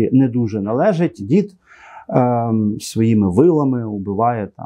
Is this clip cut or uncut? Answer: cut